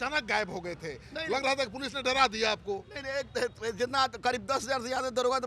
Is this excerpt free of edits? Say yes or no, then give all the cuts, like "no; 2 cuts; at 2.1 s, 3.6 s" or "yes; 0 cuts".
yes; 0 cuts